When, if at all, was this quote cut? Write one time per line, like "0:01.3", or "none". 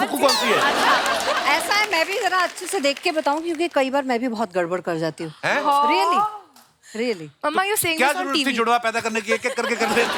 none